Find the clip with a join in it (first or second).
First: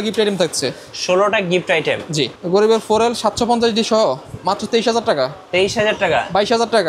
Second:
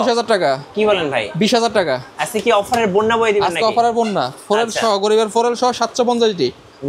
first